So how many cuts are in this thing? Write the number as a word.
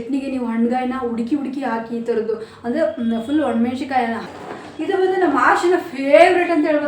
one